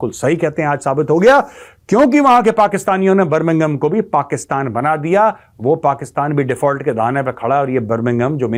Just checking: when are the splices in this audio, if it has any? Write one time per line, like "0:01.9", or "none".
none